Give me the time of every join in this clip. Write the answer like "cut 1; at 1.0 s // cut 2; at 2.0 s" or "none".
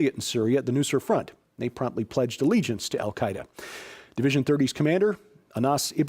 cut 1; at 1.8 s

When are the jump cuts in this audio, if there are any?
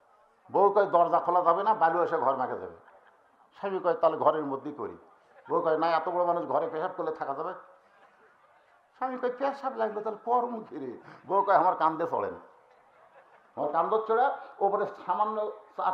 none

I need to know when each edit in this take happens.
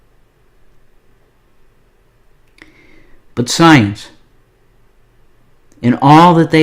cut 1; at 5.5 s

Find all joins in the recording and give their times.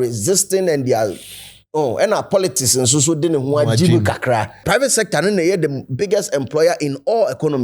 cut 1; at 4.6 s

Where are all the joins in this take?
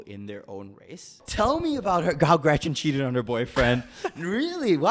cut 1; at 1.2 s

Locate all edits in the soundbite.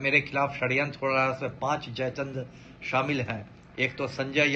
none

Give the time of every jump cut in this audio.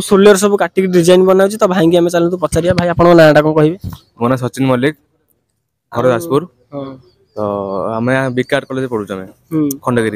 none

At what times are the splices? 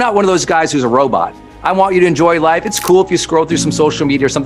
none

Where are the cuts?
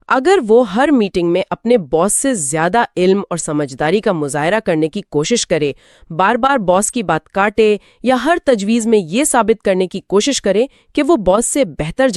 none

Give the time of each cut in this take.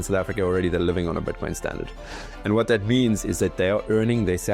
none

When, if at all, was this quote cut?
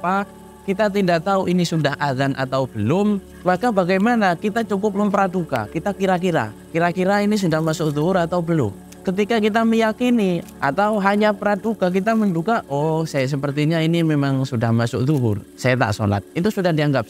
cut 1; at 3.3 s // cut 2; at 8.8 s // cut 3; at 10.5 s // cut 4; at 15.5 s

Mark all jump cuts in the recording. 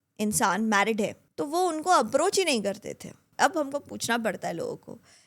cut 1; at 1.2 s // cut 2; at 3.2 s

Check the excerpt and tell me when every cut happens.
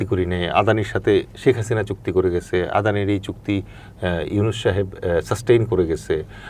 none

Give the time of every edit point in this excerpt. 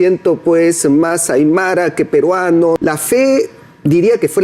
cut 1; at 2.8 s

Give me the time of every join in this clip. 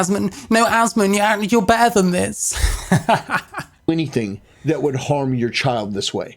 none

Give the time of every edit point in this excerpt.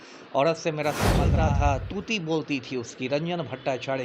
cut 1; at 1.3 s

